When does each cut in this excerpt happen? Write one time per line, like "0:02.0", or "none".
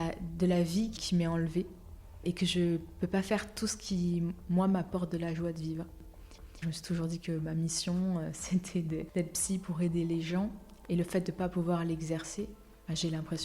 0:00.9
0:06.3
0:10.7